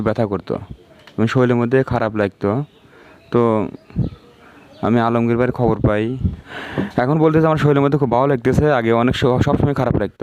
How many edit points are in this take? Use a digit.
1